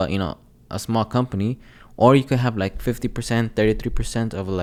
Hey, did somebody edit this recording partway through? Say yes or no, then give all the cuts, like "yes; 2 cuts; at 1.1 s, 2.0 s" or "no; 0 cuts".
no; 0 cuts